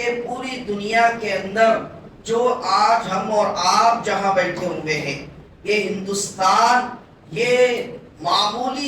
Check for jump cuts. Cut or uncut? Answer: uncut